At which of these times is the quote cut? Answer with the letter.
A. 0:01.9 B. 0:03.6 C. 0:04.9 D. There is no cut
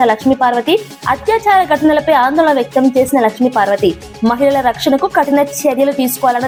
D